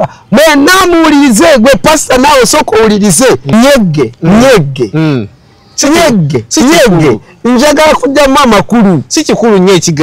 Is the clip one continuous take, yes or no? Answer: no